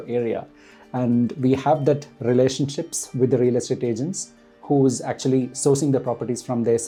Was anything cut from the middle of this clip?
no; 0 cuts

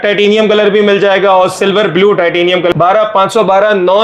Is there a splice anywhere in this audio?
yes; 1 cut; at 2.7 s

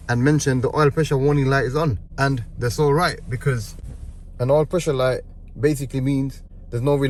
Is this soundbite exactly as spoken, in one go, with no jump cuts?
yes; 0 cuts

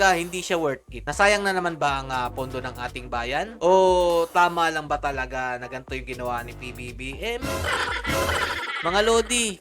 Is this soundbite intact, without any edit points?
yes; 0 cuts

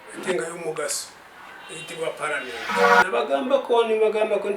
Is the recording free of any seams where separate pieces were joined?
no; 1 cut; at 2.9 s

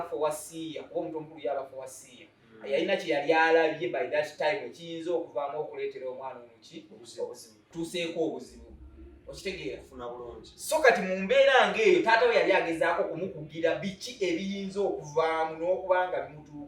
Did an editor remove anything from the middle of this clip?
yes; 1 cut; at 7.7 s

